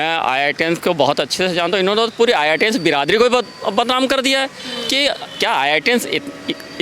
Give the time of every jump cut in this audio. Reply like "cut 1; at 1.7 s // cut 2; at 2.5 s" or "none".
none